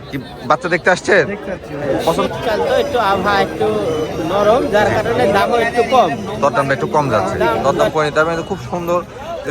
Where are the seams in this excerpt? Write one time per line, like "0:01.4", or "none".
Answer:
0:02.1
0:07.7